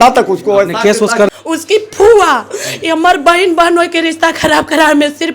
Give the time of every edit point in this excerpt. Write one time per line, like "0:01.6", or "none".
0:01.3

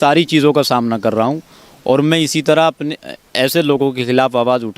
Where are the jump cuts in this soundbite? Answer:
none

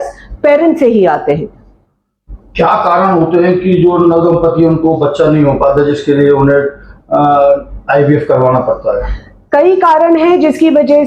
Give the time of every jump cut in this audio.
none

